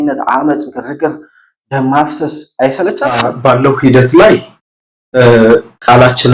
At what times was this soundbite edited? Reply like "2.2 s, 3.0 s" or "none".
3.3 s